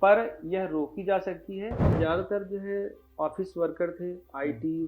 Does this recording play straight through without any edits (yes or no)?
no